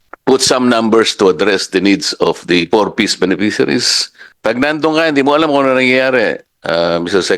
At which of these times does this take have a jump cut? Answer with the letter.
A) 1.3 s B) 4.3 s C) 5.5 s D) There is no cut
B